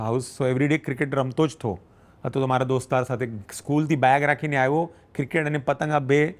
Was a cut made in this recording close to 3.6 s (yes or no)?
no